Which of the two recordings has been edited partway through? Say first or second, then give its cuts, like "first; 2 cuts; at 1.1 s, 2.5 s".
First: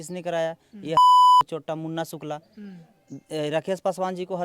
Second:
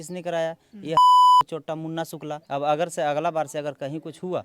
second; 1 cut; at 2.4 s